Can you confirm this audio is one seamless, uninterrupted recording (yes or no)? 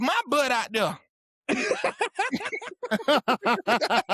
yes